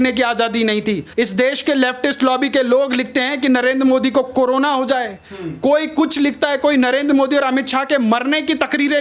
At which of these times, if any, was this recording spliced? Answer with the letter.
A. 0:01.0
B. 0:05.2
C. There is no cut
A